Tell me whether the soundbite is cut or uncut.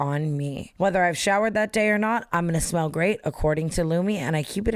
uncut